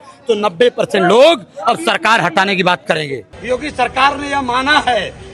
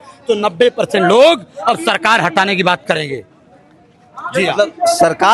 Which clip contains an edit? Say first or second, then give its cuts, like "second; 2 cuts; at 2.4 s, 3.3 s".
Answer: first; 1 cut; at 3.3 s